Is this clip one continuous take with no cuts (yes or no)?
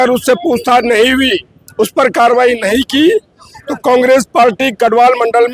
yes